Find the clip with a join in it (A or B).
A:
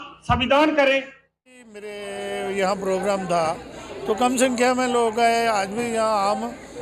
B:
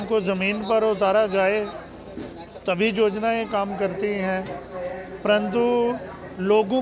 A